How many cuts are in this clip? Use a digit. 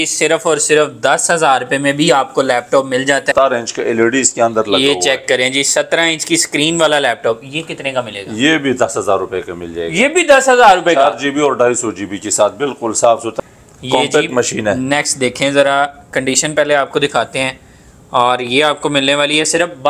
2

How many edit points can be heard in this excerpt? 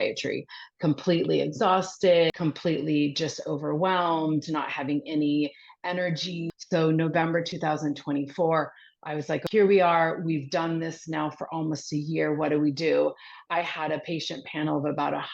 3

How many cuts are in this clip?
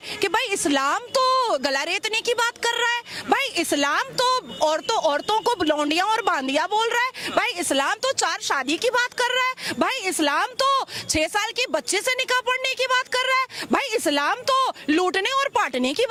0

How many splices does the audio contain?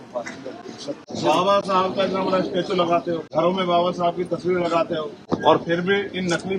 3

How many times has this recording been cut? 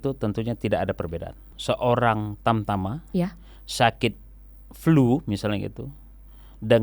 1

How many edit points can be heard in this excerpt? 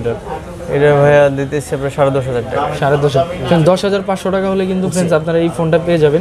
0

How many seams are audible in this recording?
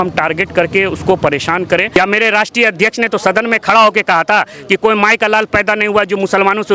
1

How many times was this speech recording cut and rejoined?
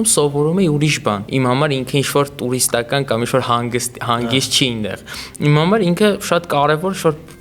1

